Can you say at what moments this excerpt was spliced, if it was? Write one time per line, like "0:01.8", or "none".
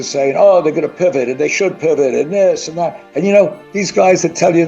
0:03.0
0:03.6